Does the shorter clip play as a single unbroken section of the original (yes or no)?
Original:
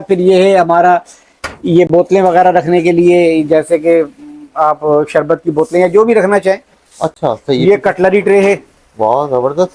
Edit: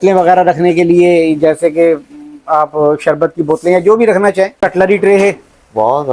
no